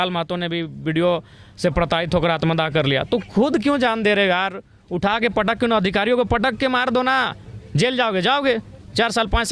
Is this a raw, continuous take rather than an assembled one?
yes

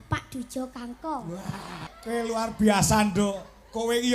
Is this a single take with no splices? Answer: no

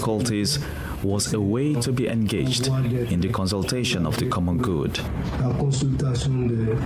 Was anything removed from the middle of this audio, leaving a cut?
no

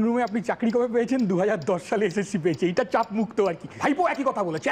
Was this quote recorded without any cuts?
no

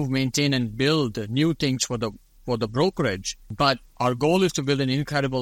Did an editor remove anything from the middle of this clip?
yes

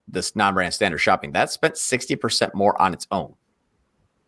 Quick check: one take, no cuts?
yes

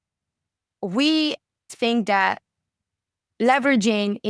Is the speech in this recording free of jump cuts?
no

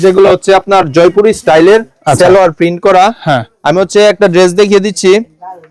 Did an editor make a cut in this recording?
no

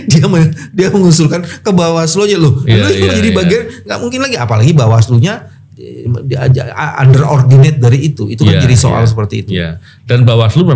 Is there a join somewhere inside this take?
no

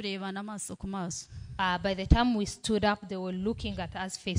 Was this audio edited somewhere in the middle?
no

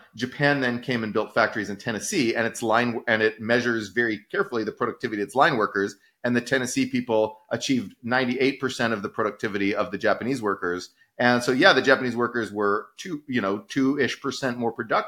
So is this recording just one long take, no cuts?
yes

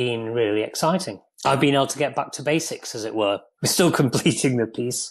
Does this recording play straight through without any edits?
no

